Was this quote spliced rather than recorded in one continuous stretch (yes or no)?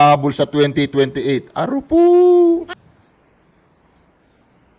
yes